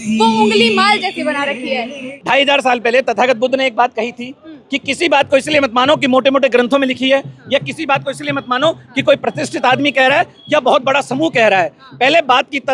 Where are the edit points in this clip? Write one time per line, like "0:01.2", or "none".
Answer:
0:02.1